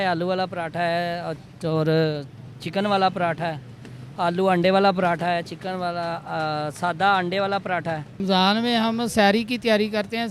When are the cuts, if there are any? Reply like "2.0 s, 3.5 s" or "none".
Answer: 8.2 s